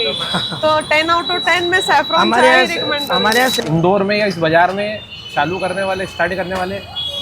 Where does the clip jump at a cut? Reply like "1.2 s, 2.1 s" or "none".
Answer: 3.6 s